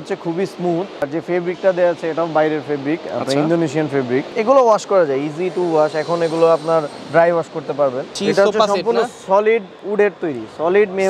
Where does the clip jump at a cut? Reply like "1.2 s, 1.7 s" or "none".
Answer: 1.0 s, 4.3 s, 8.2 s